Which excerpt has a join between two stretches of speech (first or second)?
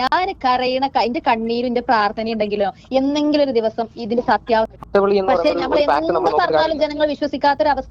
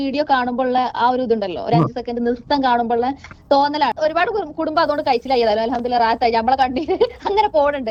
first